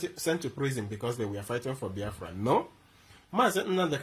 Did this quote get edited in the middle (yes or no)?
no